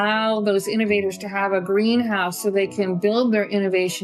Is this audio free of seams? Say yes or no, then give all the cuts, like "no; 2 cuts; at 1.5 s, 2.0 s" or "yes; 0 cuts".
yes; 0 cuts